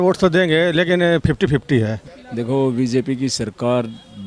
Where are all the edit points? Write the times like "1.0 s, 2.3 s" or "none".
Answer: 2.1 s